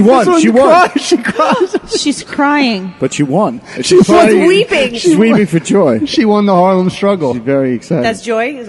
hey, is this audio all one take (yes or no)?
yes